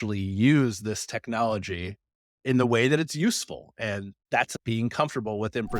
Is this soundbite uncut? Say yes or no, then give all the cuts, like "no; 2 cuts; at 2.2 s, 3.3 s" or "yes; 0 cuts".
no; 2 cuts; at 2.4 s, 4.4 s